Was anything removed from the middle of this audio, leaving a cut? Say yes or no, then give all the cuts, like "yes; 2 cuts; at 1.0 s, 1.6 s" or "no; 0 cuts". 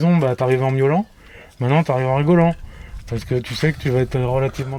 no; 0 cuts